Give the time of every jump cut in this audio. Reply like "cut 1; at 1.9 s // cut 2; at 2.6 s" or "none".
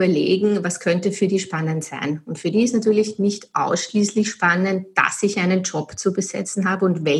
none